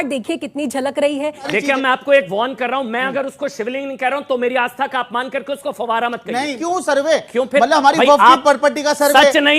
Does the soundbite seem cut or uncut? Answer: cut